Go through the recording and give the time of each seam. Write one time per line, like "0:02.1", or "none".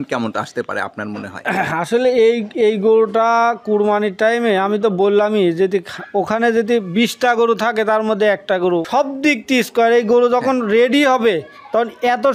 0:08.9